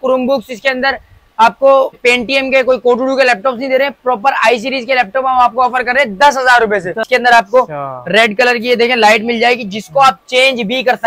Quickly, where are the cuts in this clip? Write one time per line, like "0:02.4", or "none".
0:02.0
0:07.1

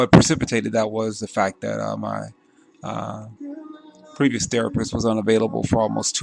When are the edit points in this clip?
0:04.2

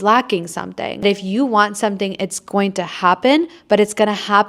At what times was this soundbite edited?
0:01.0

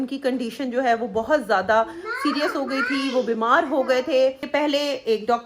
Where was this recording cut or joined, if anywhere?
0:04.4

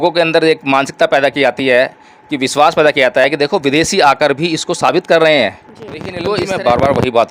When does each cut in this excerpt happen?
0:06.1

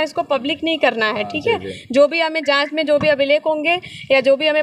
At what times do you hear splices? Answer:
none

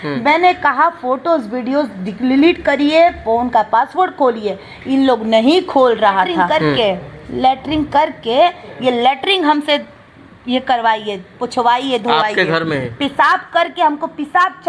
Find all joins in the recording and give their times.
0:06.6

